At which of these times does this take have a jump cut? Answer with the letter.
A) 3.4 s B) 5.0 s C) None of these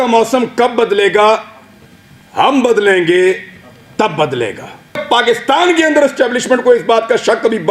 B